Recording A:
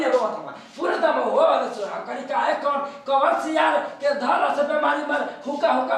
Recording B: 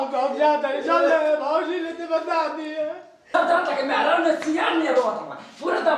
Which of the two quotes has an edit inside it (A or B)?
B